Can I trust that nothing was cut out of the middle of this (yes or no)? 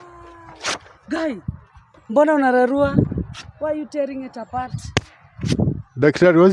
yes